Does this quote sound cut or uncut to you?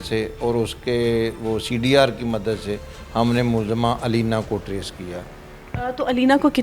uncut